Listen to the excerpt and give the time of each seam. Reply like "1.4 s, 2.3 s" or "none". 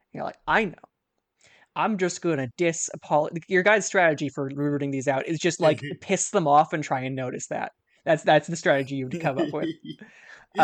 none